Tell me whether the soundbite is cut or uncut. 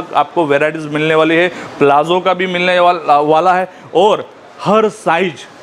uncut